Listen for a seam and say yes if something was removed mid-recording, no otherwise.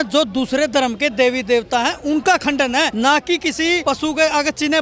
yes